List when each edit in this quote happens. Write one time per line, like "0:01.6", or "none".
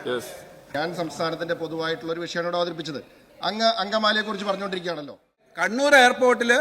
0:05.5

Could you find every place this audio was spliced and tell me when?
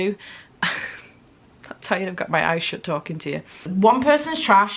0:03.5

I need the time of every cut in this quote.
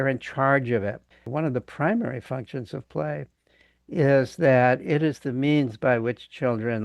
0:01.3

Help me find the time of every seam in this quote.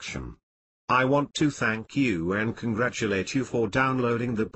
none

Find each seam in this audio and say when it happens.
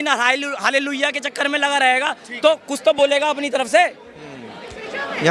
none

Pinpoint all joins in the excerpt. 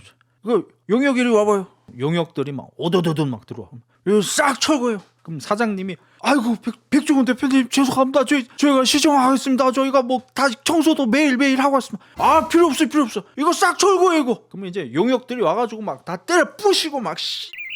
none

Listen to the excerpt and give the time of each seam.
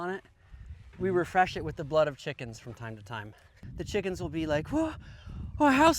0:03.6

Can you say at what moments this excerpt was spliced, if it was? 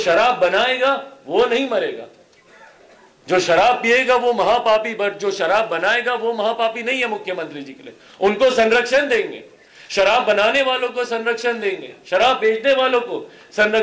none

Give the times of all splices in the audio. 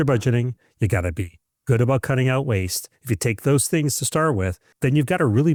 none

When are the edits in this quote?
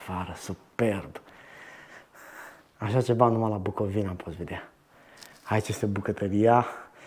none

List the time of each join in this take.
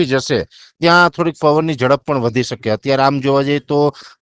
none

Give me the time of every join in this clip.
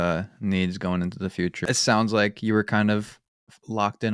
0:01.7

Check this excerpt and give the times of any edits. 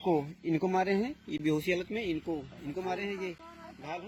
none

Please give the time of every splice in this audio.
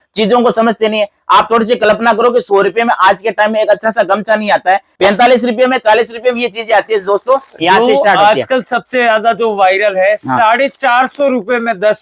0:04.9

